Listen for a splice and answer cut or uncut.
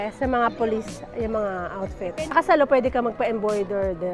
cut